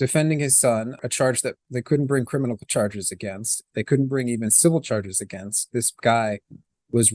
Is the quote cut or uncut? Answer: cut